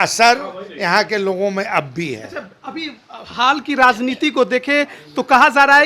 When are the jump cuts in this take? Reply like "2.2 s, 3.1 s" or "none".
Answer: none